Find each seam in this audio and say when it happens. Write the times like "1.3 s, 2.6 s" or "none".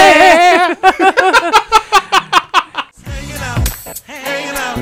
2.8 s